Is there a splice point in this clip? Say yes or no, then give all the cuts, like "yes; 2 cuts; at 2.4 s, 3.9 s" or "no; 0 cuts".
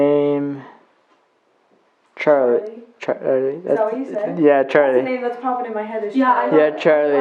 no; 0 cuts